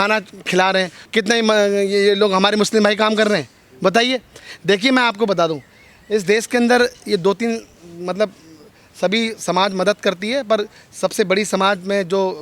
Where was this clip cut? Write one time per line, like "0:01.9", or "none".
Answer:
none